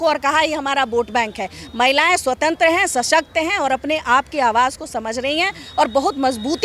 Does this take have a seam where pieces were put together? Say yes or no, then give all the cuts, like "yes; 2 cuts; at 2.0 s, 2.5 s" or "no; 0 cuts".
no; 0 cuts